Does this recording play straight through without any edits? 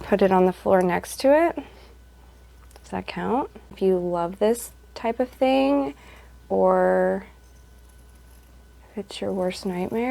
no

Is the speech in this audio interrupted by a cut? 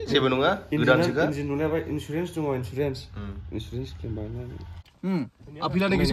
yes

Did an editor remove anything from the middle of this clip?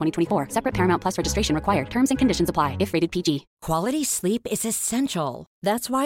yes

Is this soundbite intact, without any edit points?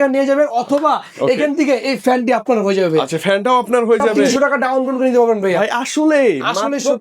no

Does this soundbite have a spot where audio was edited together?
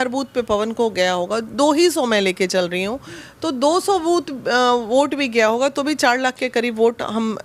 no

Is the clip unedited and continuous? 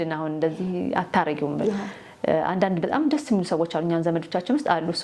yes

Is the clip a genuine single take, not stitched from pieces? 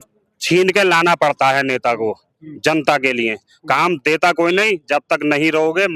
yes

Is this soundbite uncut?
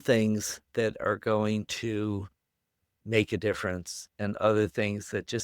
yes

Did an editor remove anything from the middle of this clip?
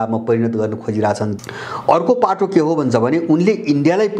yes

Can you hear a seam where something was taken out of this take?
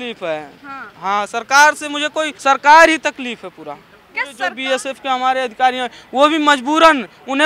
yes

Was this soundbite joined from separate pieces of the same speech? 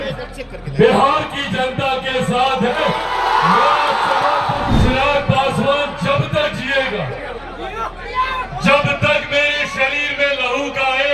yes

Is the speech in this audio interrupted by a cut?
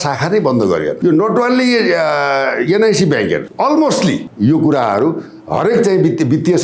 yes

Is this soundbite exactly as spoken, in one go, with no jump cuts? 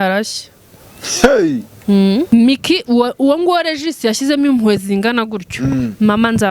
no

